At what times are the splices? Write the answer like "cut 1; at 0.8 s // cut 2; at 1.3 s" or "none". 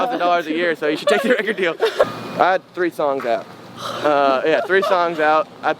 cut 1; at 2.0 s